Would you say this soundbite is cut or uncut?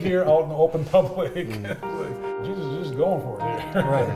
cut